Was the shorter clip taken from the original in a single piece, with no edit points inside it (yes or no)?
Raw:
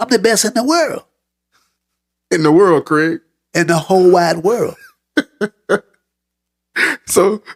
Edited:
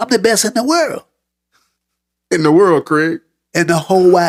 yes